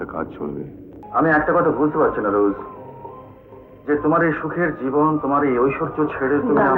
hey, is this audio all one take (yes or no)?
no